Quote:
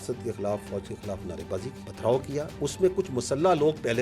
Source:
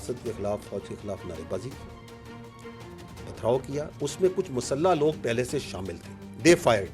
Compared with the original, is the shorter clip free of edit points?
no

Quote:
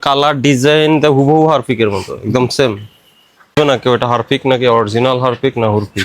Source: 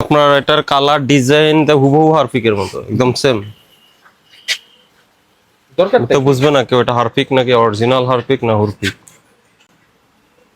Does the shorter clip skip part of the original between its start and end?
yes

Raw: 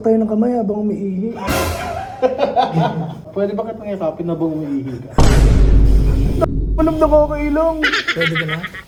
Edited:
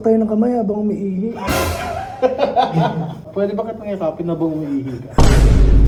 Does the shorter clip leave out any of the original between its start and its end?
no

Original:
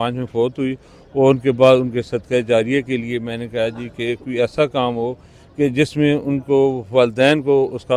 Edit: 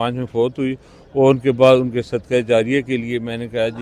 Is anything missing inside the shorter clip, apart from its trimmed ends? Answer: no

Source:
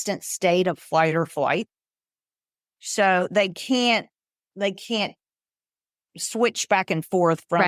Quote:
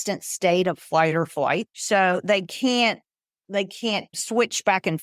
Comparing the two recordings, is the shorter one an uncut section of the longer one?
no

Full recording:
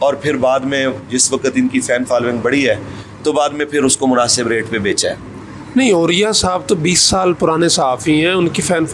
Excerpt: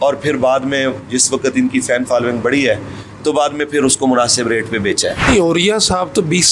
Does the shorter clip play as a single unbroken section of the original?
no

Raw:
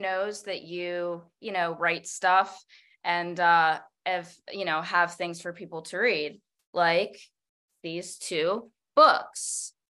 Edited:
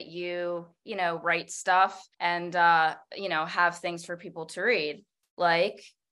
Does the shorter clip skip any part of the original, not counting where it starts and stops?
yes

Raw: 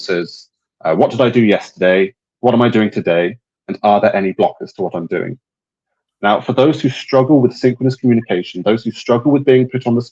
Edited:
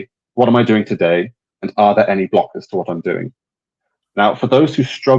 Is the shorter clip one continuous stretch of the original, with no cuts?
yes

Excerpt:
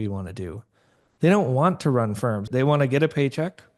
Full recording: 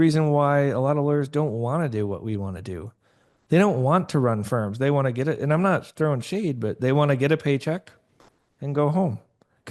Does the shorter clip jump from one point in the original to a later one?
yes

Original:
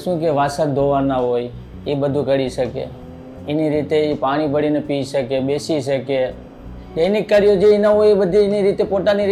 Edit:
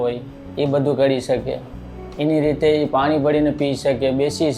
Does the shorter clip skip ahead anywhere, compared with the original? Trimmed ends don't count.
no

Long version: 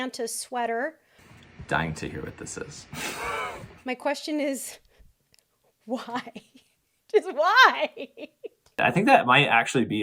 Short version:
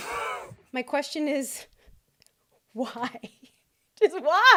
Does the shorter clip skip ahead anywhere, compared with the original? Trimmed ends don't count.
no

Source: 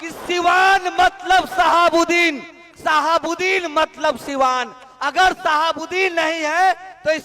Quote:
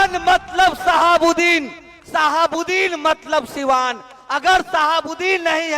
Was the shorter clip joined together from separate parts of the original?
no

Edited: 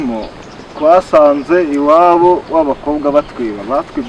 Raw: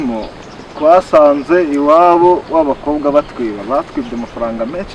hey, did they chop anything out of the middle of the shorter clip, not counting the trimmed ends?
no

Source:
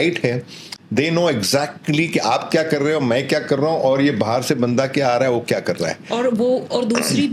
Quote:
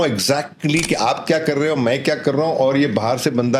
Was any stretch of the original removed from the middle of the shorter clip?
no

